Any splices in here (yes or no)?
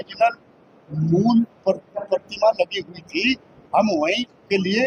no